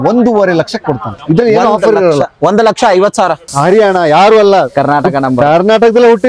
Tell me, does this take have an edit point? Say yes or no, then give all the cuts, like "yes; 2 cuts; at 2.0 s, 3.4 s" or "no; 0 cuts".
yes; 1 cut; at 3.4 s